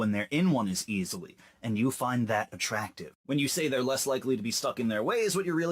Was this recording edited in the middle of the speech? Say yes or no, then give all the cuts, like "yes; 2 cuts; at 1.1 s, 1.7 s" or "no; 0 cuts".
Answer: no; 0 cuts